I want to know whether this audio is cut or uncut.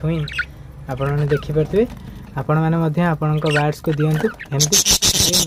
uncut